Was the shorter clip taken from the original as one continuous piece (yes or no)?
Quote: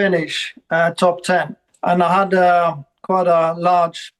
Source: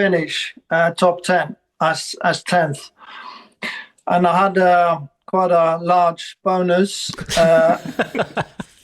no